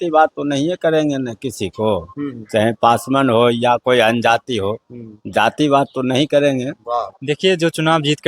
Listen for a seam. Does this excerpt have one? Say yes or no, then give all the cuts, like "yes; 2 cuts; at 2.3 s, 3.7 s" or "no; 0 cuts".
yes; 1 cut; at 7.1 s